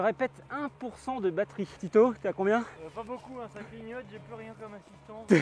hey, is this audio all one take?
yes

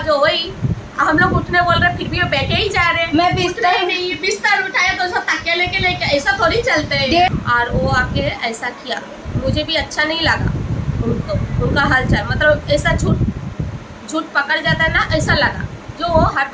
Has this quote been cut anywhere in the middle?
yes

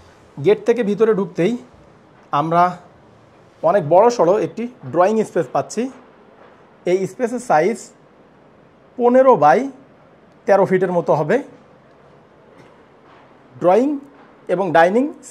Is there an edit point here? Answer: no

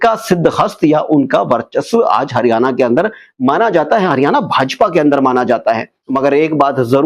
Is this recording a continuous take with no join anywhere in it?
no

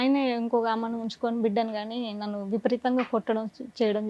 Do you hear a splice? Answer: no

